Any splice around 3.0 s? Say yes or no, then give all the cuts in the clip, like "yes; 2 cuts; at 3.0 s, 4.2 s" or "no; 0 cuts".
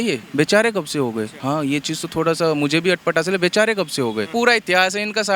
no; 2 cuts; at 1.3 s, 4.3 s